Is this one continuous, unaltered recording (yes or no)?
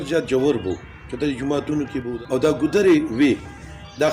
no